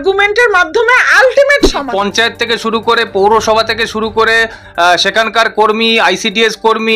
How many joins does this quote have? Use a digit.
1